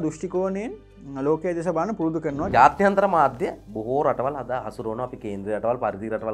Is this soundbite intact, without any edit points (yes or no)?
no